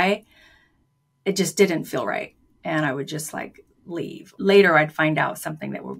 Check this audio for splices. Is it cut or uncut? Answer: cut